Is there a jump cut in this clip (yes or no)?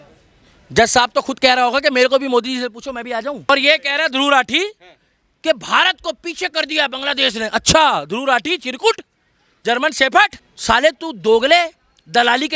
yes